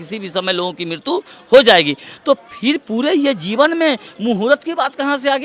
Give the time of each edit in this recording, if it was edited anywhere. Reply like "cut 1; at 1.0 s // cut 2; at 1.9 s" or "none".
none